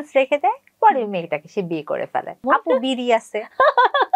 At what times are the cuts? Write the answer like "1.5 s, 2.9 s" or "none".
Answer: 2.4 s